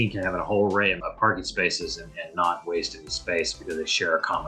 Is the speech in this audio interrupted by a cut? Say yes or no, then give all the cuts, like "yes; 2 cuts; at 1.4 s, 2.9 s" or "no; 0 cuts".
no; 0 cuts